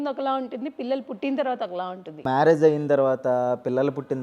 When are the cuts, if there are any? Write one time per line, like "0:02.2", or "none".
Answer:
none